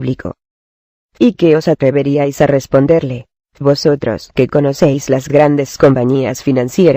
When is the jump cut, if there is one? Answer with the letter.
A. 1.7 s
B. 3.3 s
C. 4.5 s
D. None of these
B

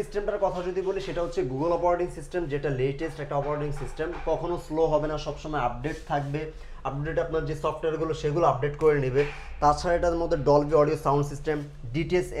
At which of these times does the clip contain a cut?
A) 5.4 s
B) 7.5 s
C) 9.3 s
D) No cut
D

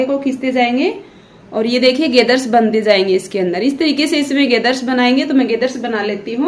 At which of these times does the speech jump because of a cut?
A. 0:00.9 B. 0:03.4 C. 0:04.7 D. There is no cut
D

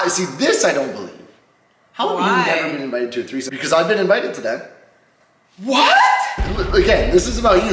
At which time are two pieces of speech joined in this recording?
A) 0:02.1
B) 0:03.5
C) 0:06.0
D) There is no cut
B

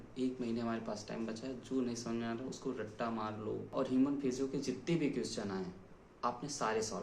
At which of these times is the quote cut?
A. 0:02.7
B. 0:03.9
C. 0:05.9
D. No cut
B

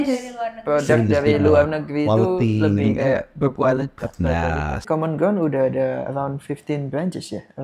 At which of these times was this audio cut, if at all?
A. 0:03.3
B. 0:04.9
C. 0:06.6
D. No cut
B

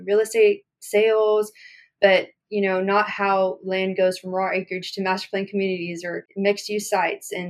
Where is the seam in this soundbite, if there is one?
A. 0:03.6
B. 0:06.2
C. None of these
B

